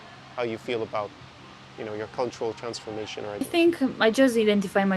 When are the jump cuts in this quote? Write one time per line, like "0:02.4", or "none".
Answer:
0:03.4